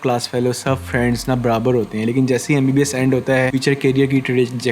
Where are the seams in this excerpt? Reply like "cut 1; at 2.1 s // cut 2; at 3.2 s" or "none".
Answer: cut 1; at 3.6 s